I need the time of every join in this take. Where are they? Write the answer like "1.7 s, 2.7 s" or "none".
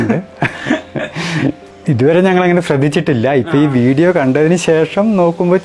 1.7 s